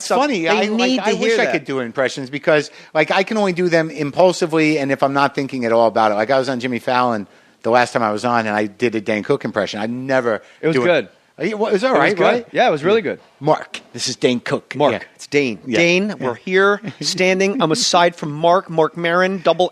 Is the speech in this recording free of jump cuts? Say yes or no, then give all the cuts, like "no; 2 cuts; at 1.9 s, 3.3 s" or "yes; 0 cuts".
yes; 0 cuts